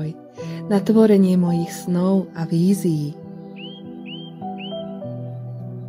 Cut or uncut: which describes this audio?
cut